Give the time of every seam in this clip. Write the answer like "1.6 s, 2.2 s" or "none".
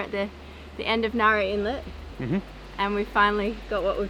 none